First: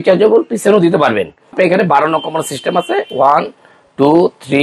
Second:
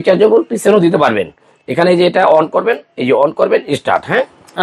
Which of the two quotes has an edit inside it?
first; 1 cut; at 1.5 s

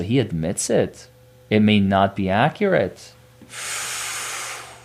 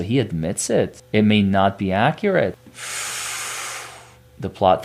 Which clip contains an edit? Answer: second; 2 cuts; at 1.0 s, 2.6 s

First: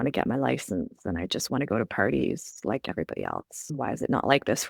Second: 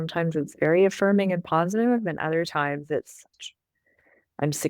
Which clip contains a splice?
second; 1 cut; at 3.3 s

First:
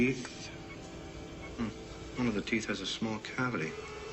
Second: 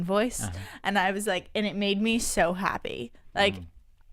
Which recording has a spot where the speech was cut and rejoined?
second; 1 cut; at 1.3 s

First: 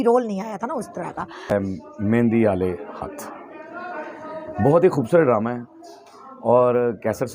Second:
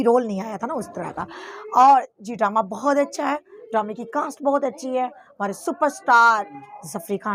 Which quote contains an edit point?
first; 1 cut; at 1.5 s

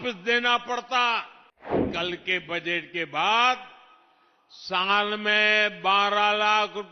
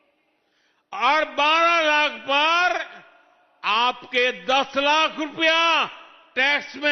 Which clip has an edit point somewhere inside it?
first; 1 cut; at 1.8 s

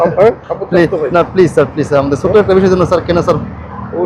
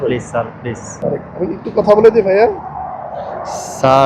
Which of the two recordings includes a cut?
second; 1 cut; at 0.9 s

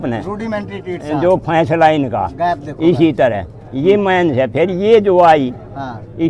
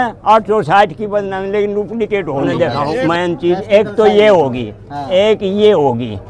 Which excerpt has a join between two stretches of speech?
second; 1 cut; at 2.5 s

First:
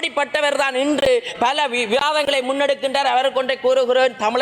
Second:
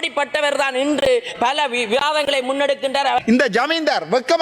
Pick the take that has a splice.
second; 1 cut; at 3.2 s

